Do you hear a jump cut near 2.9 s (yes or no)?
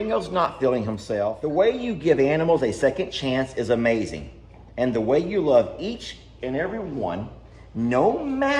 no